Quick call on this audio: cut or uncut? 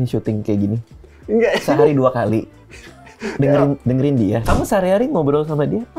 cut